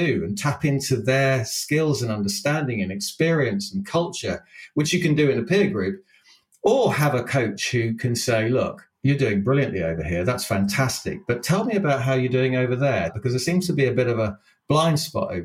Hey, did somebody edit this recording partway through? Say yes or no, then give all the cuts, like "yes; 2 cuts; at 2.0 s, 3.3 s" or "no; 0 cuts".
yes; 2 cuts; at 8.9 s, 13.1 s